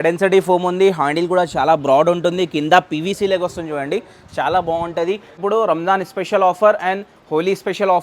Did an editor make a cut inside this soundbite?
yes; 1 cut; at 5.4 s

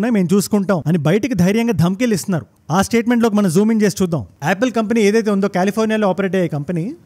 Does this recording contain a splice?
yes; 1 cut; at 4.3 s

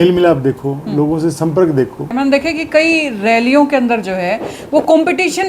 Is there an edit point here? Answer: yes; 1 cut; at 2.1 s

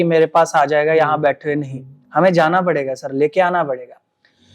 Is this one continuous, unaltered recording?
yes; 0 cuts

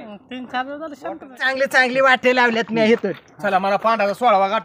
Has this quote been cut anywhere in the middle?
yes; 1 cut; at 1.3 s

